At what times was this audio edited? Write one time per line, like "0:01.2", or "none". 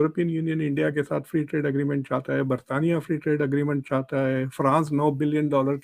none